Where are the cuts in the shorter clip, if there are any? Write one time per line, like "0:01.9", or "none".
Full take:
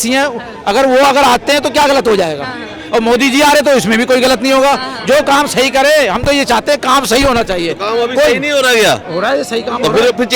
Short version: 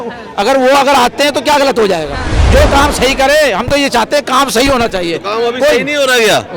0:02.4